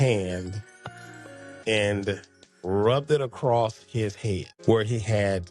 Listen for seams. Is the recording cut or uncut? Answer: cut